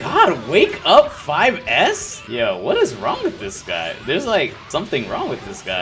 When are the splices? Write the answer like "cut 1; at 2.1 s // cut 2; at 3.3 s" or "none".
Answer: cut 1; at 2.1 s // cut 2; at 4.6 s